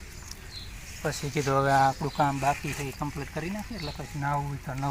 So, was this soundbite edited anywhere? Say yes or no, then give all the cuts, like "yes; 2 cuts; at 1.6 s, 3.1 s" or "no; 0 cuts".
no; 0 cuts